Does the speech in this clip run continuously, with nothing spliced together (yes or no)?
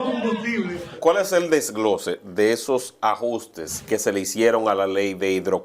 no